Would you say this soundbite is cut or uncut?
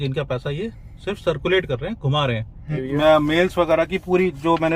cut